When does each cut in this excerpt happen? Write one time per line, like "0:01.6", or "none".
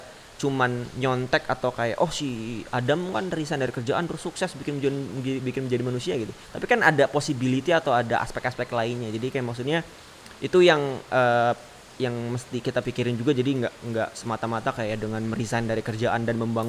none